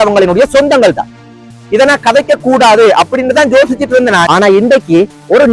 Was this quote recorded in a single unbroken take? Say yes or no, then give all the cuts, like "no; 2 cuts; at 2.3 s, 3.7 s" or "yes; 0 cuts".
no; 1 cut; at 4.2 s